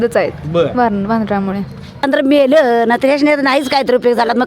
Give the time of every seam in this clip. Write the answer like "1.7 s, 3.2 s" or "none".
2.0 s